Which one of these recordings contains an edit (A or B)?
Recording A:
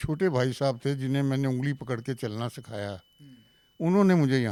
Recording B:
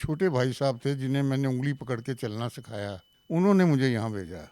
B